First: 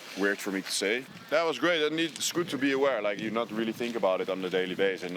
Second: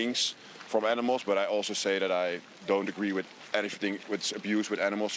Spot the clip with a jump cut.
first; 1 cut; at 1.0 s

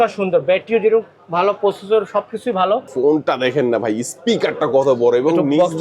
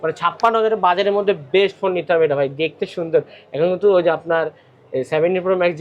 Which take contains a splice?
first; 1 cut; at 2.9 s

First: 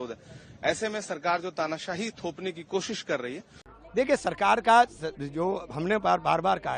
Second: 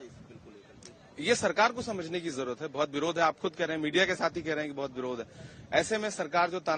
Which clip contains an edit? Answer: first; 1 cut; at 3.8 s

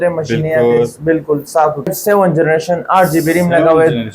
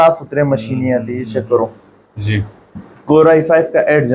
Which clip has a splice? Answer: first; 1 cut; at 1.9 s

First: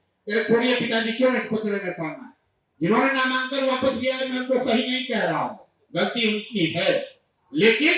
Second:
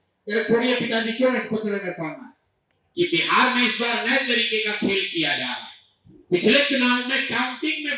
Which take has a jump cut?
second; 1 cut; at 2.6 s

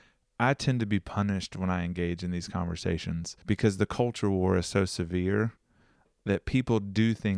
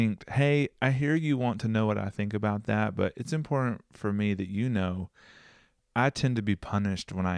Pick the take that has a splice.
first; 1 cut; at 3.3 s

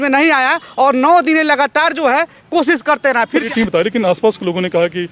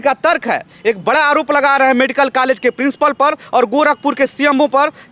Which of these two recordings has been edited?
first; 1 cut; at 3.5 s

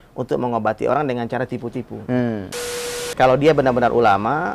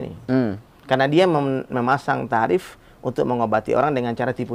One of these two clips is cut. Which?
first; 1 cut; at 2.7 s

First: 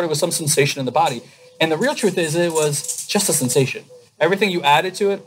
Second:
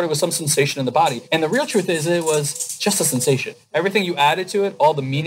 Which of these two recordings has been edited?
second; 2 cuts; at 1.2 s, 3.6 s

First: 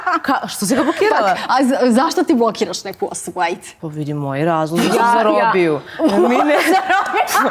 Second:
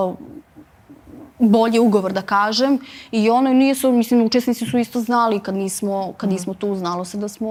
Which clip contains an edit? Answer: first; 1 cut; at 3.7 s

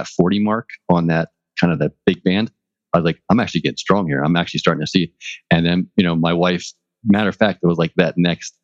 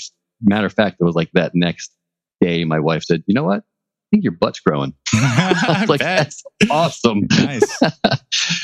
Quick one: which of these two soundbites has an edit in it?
first; 2 cuts; at 1.3 s, 3.2 s

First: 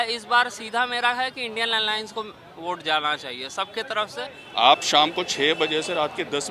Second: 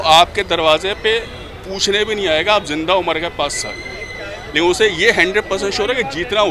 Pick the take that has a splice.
first; 1 cut; at 4.4 s

